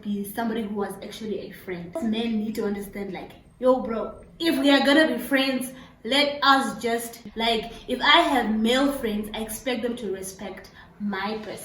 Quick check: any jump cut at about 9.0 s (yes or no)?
no